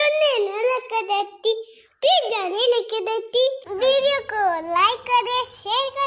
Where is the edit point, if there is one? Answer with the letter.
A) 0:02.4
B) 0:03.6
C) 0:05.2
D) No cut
B